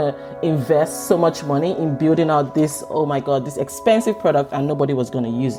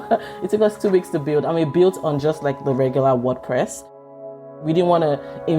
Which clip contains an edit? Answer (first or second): second